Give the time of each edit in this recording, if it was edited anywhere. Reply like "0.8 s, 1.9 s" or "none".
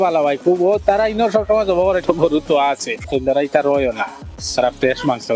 2.0 s, 3.1 s